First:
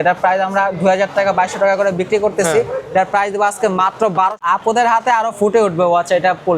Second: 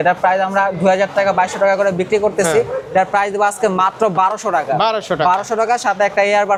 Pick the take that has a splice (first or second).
first